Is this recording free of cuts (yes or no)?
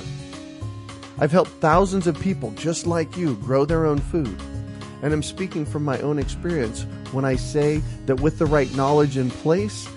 yes